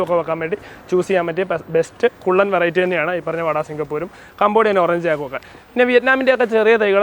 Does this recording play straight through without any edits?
yes; 0 cuts

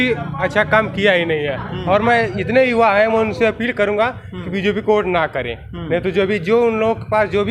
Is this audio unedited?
yes; 0 cuts

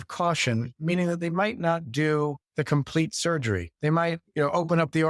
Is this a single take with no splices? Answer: no; 2 cuts; at 2.4 s, 3.7 s

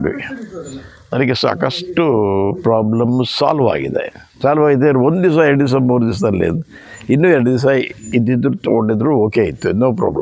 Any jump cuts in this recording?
no; 0 cuts

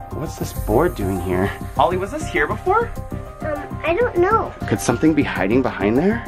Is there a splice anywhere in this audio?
yes; 2 cuts; at 1.6 s, 4.6 s

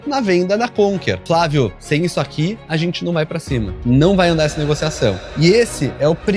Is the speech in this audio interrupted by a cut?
yes; 3 cuts; at 1.2 s, 3.8 s, 5.2 s

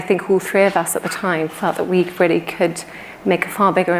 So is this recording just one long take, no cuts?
yes; 0 cuts

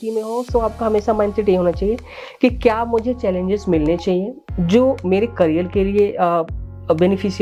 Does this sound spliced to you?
no; 0 cuts

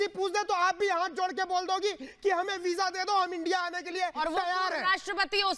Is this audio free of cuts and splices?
yes; 0 cuts

